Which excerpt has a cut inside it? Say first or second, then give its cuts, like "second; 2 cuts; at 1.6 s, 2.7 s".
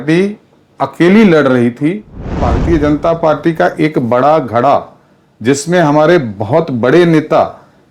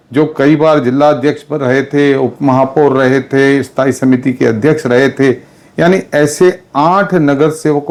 first; 1 cut; at 2.4 s